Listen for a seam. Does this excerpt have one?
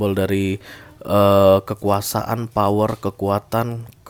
no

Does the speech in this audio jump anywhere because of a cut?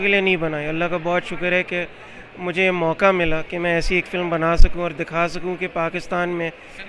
no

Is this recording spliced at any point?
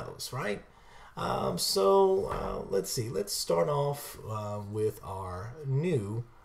yes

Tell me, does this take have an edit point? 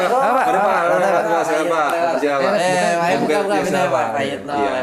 no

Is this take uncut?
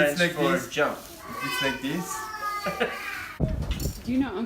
no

